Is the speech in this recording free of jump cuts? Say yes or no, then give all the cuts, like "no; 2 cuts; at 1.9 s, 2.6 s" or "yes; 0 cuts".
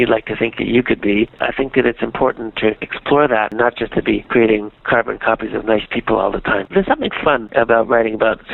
no; 3 cuts; at 3.5 s, 4.8 s, 6.7 s